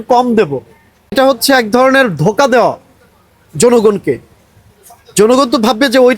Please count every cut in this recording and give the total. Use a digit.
1